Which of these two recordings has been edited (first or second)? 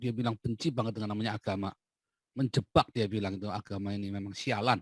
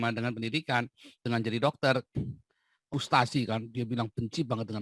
second